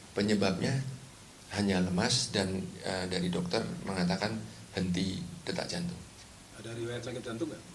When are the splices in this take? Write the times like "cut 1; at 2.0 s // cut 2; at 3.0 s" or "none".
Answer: cut 1; at 2.5 s // cut 2; at 6.8 s